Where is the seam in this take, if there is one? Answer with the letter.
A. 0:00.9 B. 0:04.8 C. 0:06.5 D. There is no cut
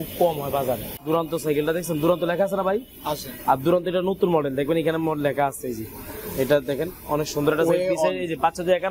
A